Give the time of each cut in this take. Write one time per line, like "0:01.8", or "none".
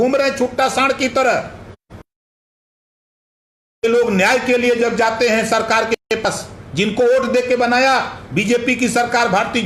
none